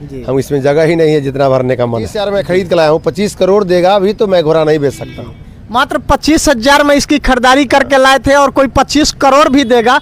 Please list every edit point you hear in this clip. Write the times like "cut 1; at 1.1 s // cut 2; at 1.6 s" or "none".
cut 1; at 2.1 s